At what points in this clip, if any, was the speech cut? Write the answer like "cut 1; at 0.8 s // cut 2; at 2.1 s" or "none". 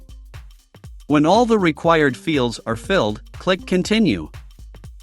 cut 1; at 1.0 s